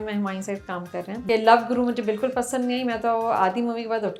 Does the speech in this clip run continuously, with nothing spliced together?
no; 1 cut; at 1.2 s

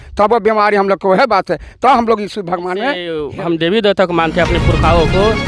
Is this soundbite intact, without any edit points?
no; 1 cut; at 3.2 s

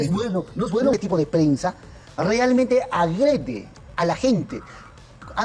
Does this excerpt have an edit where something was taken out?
yes; 1 cut; at 0.9 s

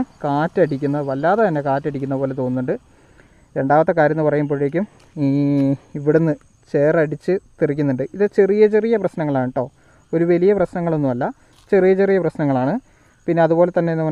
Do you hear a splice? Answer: no; 0 cuts

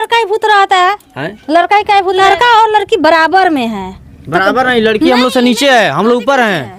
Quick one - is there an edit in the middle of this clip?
yes; 1 cut; at 2.2 s

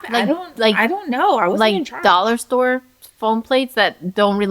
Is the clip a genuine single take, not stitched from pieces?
yes; 0 cuts

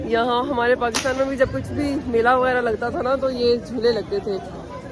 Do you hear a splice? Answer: no; 0 cuts

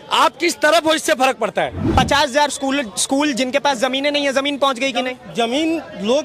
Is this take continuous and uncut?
no; 1 cut; at 1.8 s

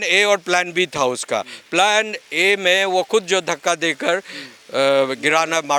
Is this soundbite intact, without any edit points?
yes; 0 cuts

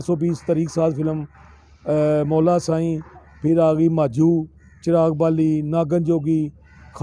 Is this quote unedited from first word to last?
yes; 0 cuts

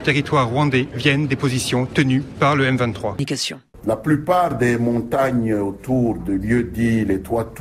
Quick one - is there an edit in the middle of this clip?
yes; 1 cut; at 3.2 s

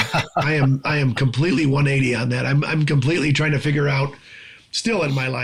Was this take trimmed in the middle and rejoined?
no; 0 cuts

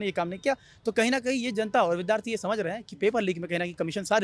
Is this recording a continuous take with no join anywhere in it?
yes; 0 cuts

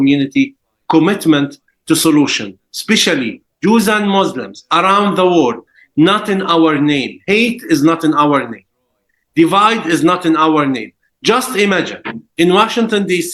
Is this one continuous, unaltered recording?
yes; 0 cuts

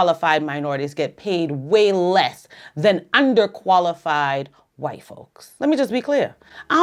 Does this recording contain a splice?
no; 0 cuts

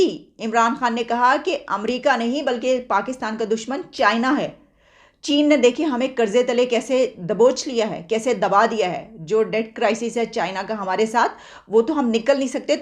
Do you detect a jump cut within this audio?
no; 0 cuts

